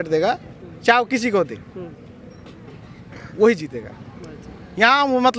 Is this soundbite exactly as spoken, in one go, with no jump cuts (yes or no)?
yes